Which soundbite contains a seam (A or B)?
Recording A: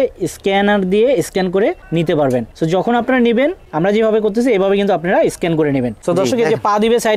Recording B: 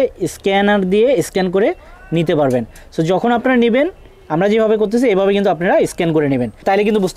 A